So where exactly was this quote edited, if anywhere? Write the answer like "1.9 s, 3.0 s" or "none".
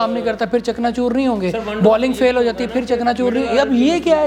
none